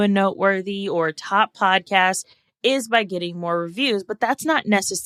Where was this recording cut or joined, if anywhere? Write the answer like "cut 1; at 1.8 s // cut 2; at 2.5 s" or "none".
none